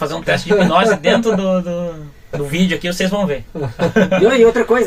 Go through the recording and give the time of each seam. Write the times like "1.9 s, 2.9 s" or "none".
none

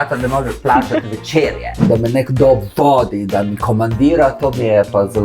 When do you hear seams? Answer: 1.9 s

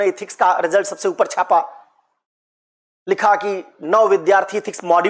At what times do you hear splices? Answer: none

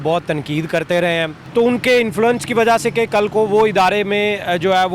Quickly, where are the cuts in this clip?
1.4 s

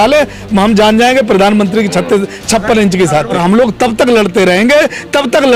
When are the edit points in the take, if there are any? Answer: 3.3 s

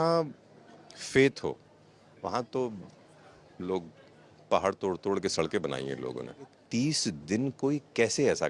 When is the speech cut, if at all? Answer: 6.6 s

